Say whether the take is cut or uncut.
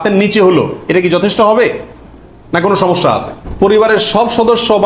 cut